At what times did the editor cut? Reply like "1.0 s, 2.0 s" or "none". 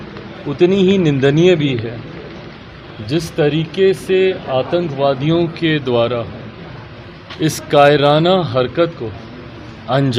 none